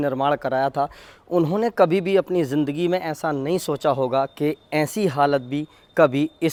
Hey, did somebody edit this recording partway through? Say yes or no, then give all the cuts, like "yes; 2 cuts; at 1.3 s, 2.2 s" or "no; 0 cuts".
no; 0 cuts